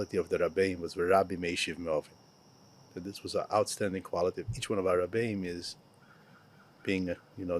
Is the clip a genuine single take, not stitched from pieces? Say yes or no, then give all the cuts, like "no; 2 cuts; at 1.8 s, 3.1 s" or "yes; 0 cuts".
yes; 0 cuts